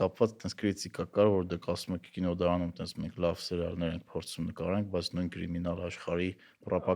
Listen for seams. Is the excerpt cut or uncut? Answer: uncut